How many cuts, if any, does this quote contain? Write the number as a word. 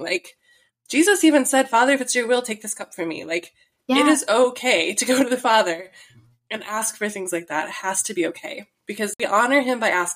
one